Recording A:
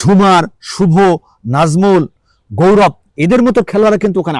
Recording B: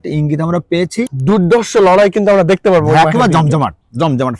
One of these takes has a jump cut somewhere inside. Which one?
B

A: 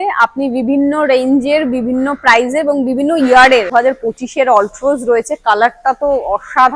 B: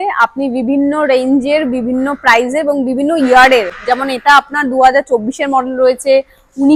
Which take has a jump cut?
A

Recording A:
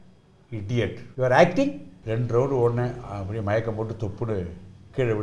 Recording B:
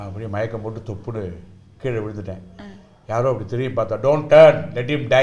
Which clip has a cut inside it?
A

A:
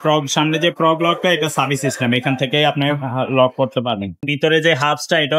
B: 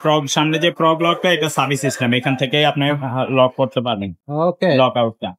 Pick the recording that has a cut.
A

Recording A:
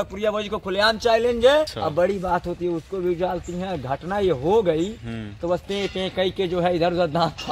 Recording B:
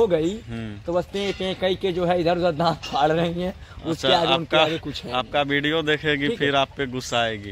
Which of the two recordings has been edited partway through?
A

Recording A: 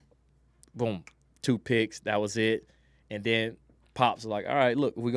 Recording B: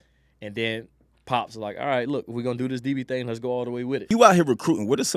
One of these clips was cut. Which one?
B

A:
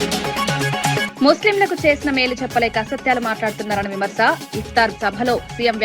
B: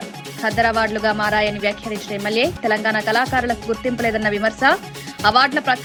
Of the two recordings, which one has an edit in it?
A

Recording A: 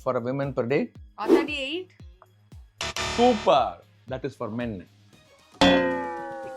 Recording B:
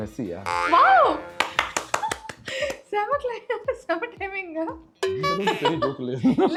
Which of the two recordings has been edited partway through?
A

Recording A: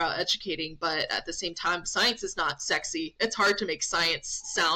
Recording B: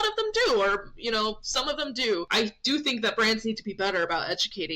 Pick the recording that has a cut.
B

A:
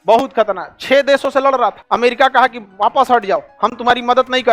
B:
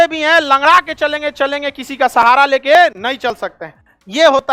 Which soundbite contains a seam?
A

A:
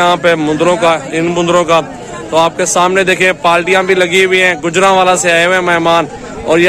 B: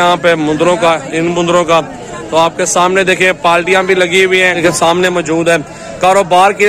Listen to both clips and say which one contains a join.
B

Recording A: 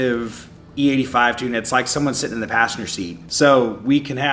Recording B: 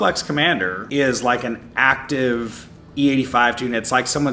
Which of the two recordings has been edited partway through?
A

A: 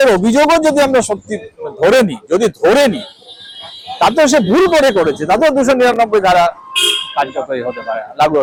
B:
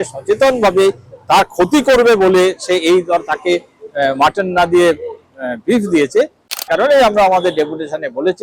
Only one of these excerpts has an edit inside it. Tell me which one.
B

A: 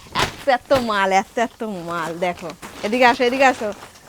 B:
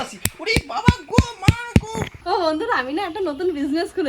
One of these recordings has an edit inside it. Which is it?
B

